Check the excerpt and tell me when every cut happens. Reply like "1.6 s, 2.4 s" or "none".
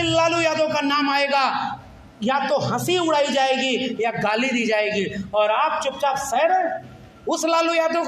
none